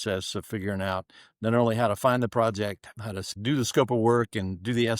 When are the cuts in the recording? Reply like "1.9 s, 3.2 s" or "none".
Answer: 2.9 s